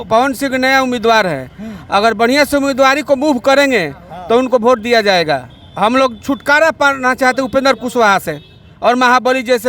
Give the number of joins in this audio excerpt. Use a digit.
0